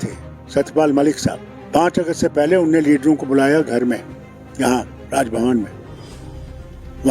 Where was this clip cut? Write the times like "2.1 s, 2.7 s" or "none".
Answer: 1.5 s